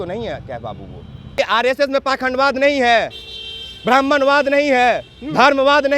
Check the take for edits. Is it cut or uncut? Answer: cut